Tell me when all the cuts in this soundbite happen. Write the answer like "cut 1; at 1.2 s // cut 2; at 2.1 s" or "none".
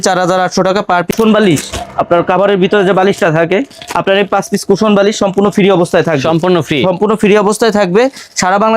cut 1; at 1.1 s